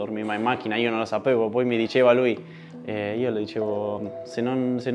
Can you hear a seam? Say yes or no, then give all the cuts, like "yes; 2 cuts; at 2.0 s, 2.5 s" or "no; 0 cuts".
no; 0 cuts